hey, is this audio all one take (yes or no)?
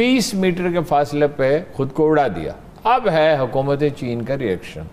yes